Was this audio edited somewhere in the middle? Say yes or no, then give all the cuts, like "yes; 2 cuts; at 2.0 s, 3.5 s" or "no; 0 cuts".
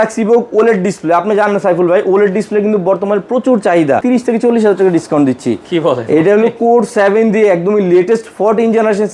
yes; 1 cut; at 4.0 s